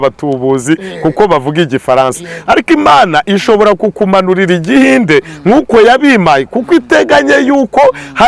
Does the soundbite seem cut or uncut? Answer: uncut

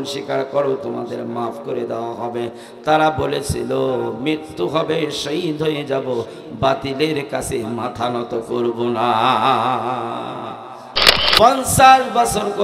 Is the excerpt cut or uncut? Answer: cut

